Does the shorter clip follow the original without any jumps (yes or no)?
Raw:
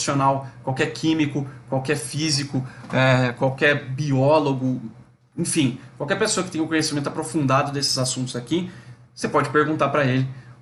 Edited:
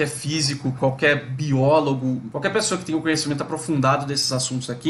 no